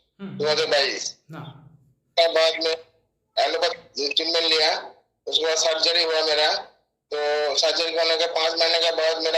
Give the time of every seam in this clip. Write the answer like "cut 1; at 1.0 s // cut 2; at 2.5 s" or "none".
none